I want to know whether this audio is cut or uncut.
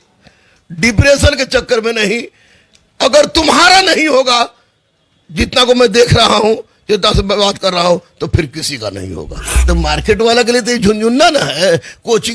cut